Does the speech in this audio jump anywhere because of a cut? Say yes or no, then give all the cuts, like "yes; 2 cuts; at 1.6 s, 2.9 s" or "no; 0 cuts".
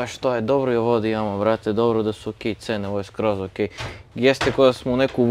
no; 0 cuts